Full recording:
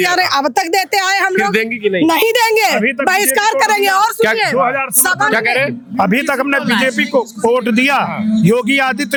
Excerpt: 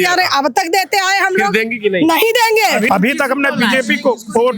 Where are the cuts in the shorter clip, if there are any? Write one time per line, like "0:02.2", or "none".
0:02.9